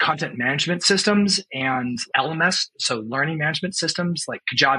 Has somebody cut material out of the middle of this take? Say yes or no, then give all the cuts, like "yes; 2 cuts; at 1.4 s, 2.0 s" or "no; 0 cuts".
yes; 1 cut; at 2.0 s